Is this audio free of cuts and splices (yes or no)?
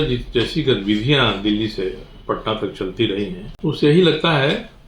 no